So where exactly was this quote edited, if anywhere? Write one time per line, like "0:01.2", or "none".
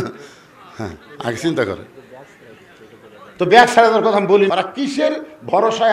0:04.5